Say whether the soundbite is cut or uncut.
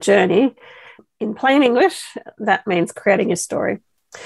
cut